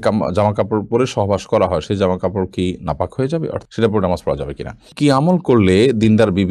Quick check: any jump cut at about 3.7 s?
yes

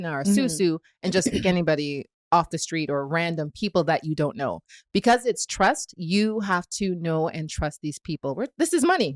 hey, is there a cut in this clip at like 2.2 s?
no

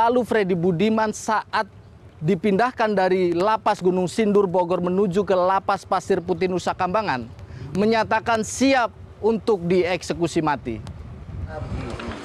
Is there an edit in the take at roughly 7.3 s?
yes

